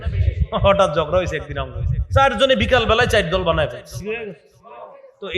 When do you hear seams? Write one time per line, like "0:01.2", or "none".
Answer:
0:04.0